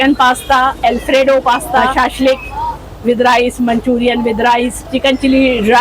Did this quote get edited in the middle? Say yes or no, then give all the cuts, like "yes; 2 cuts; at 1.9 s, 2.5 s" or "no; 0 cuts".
yes; 2 cuts; at 1.9 s, 4.9 s